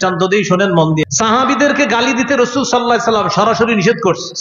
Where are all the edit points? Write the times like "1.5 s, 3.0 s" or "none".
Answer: 1.0 s